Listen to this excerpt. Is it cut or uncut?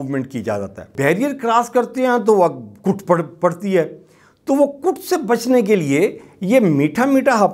cut